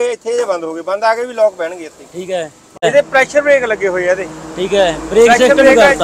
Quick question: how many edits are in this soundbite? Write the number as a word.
one